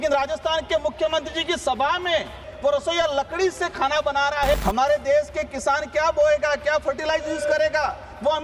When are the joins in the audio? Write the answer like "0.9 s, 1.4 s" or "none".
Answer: 2.5 s, 4.5 s